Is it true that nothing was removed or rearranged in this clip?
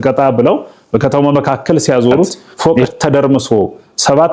no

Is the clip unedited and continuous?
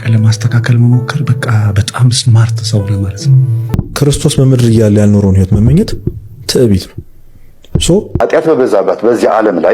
no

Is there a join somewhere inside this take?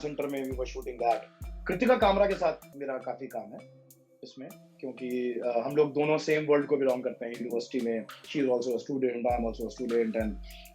yes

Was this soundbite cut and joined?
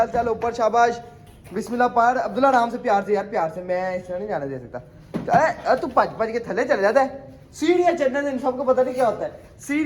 no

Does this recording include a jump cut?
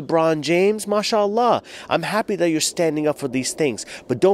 no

